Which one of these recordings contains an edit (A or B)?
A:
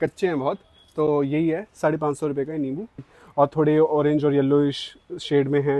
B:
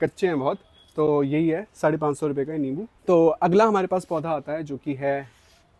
A